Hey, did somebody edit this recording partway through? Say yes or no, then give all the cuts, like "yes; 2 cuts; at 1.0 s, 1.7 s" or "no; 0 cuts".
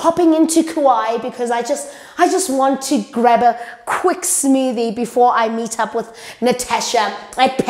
no; 0 cuts